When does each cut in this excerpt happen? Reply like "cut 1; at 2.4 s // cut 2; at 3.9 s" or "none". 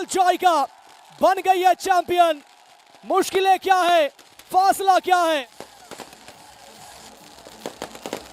none